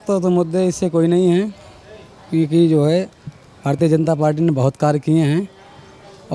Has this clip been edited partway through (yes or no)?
no